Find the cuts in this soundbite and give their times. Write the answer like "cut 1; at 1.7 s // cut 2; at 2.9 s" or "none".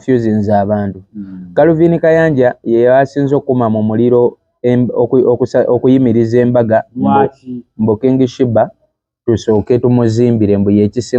none